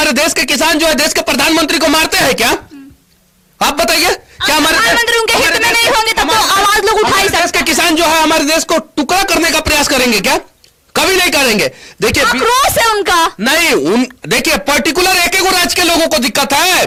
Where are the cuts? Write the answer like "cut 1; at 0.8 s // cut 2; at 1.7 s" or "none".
none